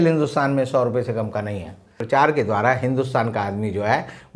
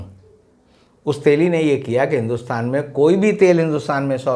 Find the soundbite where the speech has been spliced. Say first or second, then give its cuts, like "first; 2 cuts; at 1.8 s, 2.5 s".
first; 1 cut; at 2.0 s